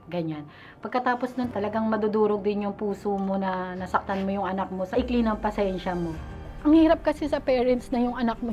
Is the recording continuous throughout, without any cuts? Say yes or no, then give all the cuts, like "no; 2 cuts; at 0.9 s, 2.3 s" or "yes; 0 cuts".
no; 3 cuts; at 1.5 s, 4.9 s, 6.5 s